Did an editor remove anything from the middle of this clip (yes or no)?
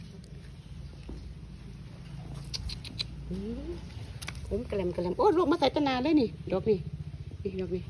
no